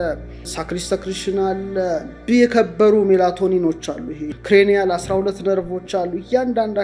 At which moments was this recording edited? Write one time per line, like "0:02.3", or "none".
0:04.3